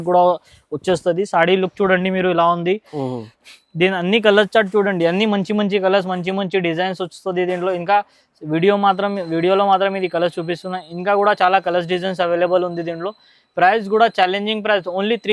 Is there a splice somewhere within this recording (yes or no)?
no